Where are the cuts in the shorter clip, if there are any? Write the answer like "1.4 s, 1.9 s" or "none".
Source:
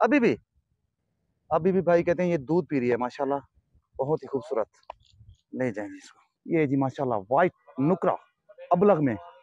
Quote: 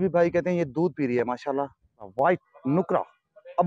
2.1 s